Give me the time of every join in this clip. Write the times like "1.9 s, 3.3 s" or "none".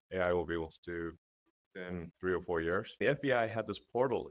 2.1 s, 2.9 s